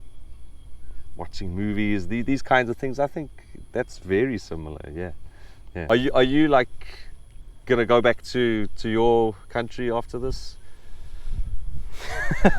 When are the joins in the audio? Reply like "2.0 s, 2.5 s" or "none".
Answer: 5.8 s

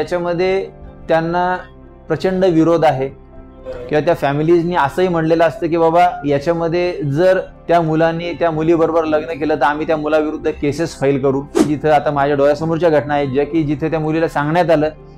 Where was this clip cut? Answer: 11.7 s

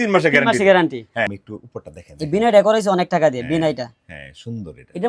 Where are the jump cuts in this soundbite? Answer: 1.3 s

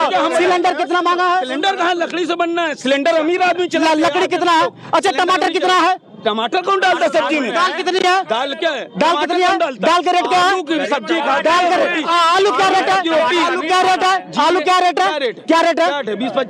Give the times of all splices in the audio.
none

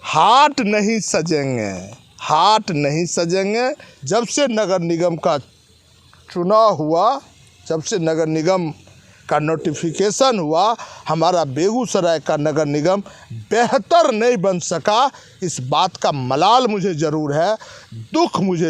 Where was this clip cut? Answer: 3.9 s

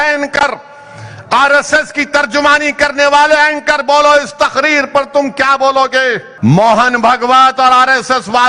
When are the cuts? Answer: 6.3 s

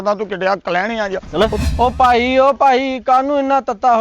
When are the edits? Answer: 1.6 s

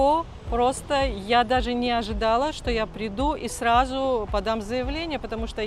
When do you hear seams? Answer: none

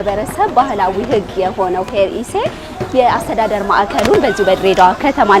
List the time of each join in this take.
none

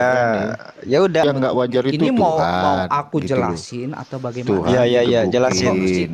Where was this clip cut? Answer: 1.2 s

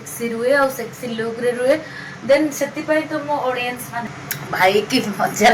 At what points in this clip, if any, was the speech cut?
4.1 s

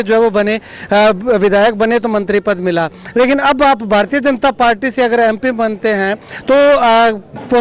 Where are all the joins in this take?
none

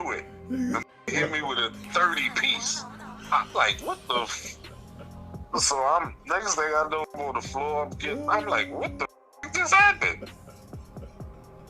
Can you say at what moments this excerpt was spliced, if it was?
5.4 s, 7.2 s, 9.4 s

